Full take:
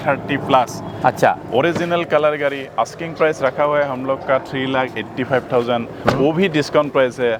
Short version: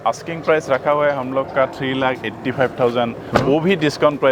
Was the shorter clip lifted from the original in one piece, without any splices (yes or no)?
yes